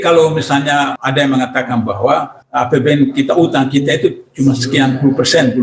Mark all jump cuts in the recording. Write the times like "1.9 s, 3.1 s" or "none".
1.0 s, 2.4 s